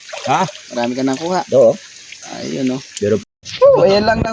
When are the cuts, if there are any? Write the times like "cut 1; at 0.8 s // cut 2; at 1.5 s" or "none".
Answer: cut 1; at 3.2 s